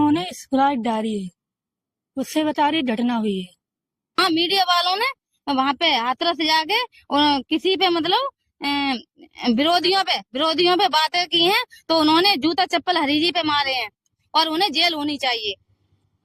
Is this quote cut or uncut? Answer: cut